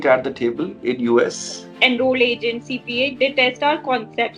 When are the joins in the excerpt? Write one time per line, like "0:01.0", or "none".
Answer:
0:01.7